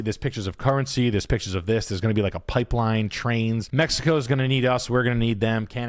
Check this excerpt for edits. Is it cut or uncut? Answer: cut